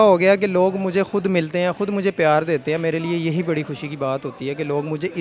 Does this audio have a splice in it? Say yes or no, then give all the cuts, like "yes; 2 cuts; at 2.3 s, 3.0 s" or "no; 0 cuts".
no; 0 cuts